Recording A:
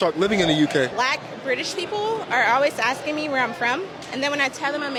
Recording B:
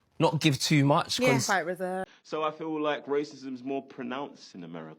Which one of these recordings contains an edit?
B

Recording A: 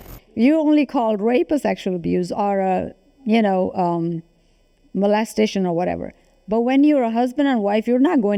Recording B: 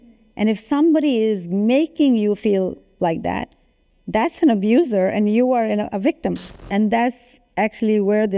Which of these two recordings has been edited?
B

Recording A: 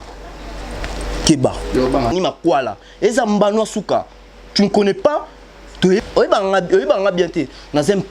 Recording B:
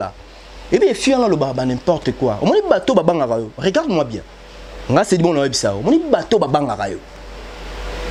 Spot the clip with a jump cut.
A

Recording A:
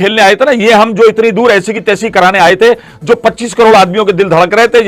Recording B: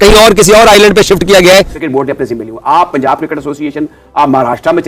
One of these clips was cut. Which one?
B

